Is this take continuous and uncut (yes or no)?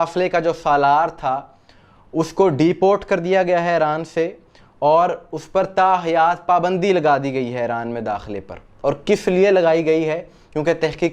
yes